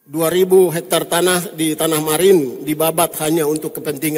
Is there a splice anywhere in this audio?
no; 0 cuts

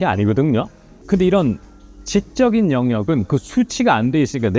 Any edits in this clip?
yes; 1 cut; at 1.0 s

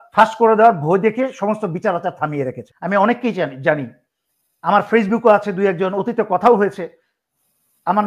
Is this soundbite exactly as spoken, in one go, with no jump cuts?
no; 1 cut; at 2.7 s

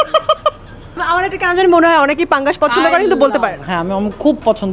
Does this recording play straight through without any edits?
no; 1 cut; at 0.9 s

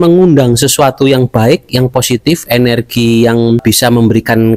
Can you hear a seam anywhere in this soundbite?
yes; 1 cut; at 3.6 s

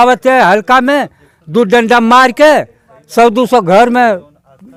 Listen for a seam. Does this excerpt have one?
no; 0 cuts

